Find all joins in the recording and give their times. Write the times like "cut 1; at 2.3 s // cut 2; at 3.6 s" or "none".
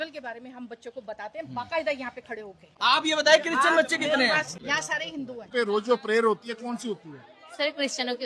cut 1; at 1.5 s // cut 2; at 2.7 s // cut 3; at 5.4 s